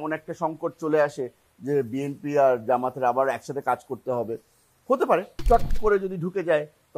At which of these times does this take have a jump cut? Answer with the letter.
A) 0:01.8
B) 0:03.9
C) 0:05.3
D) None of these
C